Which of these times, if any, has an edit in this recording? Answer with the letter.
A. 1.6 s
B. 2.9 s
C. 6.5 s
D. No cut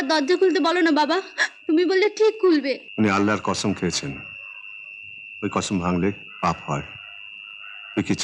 B